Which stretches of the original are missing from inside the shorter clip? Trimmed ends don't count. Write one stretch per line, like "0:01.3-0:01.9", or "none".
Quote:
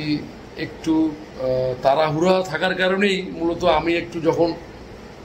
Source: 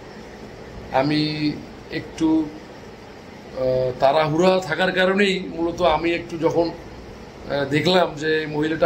0:02.6-0:03.4